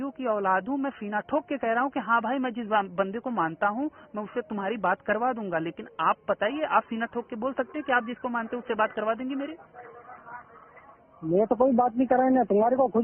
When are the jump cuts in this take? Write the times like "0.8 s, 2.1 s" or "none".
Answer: none